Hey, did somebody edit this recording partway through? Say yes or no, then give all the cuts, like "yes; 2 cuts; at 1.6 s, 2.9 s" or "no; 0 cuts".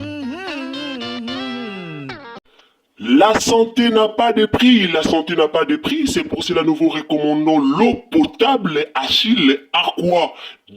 yes; 1 cut; at 2.2 s